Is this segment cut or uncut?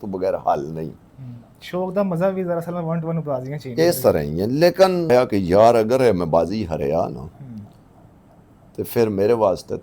cut